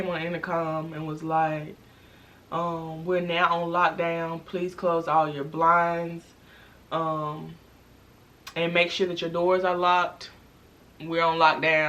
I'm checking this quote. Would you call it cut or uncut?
uncut